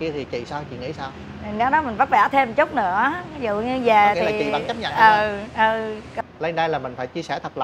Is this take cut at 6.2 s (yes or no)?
yes